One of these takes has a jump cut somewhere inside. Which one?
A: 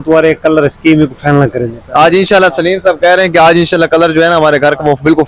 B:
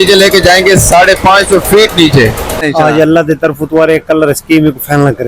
B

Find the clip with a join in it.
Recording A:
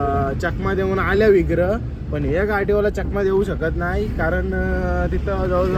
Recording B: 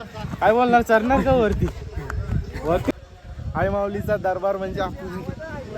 B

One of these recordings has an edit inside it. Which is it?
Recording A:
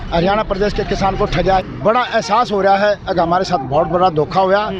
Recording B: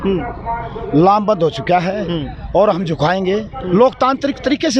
A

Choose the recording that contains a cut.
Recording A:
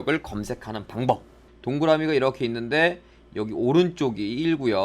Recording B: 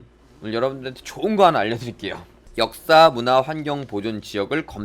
A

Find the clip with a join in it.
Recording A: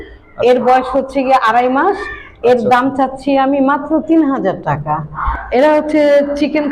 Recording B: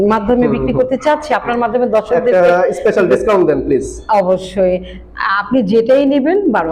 A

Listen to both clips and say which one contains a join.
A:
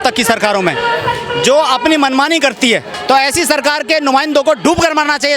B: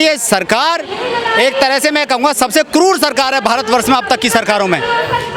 A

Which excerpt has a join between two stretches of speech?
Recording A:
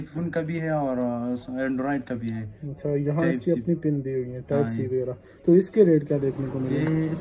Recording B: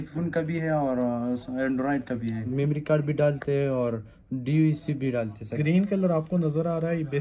B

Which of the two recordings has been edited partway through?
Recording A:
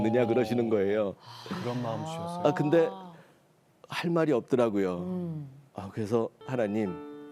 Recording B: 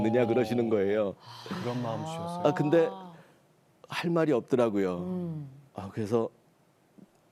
A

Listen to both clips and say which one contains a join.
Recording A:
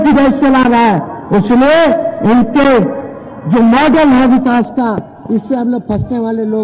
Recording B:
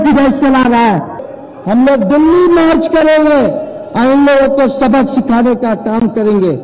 B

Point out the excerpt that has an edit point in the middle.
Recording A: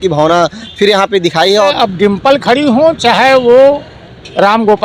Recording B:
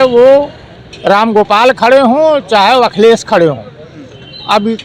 A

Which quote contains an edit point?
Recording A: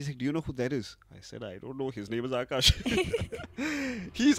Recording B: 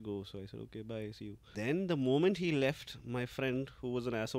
B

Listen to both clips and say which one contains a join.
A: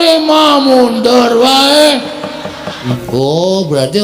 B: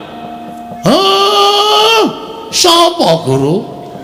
A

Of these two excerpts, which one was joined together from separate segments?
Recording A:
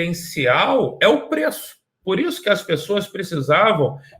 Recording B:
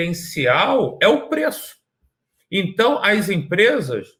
A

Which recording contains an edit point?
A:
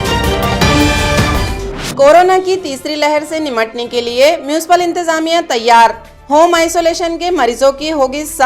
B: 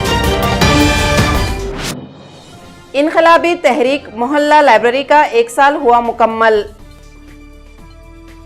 B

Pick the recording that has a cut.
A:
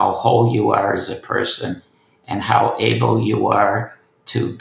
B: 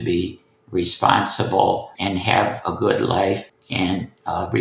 B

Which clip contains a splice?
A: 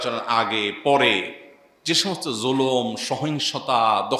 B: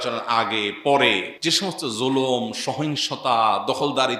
B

